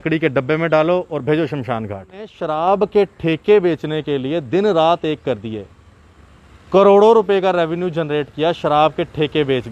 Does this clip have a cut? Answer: yes; 1 cut; at 2.4 s

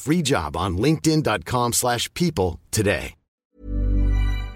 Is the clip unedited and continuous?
no; 1 cut; at 3.2 s

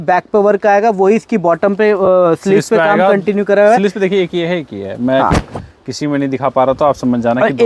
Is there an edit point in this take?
no; 0 cuts

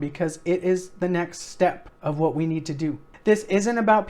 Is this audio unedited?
no; 1 cut; at 3.1 s

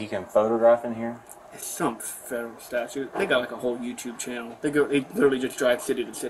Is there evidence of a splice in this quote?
no; 0 cuts

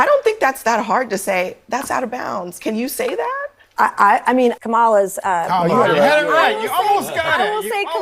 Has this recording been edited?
yes; 1 cut; at 4.6 s

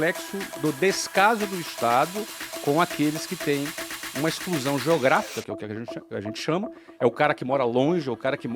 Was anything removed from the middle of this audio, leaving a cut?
no; 0 cuts

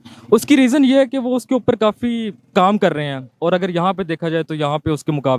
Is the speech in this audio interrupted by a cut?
no; 0 cuts

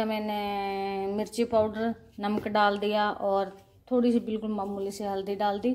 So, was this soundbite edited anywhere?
no; 0 cuts

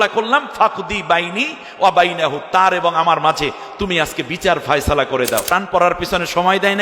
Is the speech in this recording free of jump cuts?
no; 1 cut; at 5.5 s

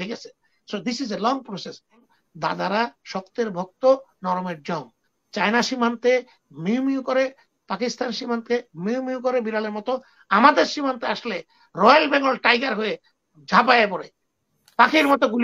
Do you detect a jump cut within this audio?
yes; 1 cut; at 2.0 s

